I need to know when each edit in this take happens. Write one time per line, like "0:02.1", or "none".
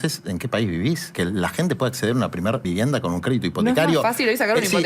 0:01.1
0:02.6